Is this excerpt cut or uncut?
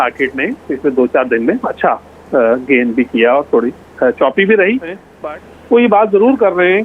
cut